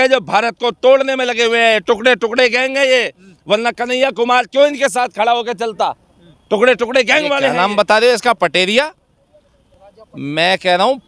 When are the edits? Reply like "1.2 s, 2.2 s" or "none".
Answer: 7.5 s